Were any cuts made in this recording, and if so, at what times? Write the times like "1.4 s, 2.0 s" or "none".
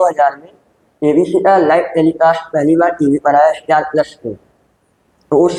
none